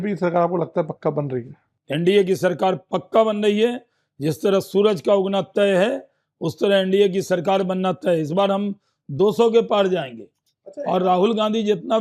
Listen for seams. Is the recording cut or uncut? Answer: uncut